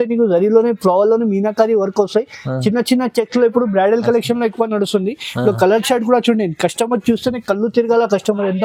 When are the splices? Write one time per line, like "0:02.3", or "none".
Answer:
none